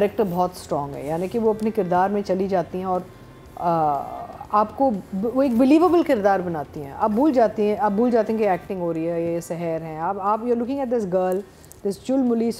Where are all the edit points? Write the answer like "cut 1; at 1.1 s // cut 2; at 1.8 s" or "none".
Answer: none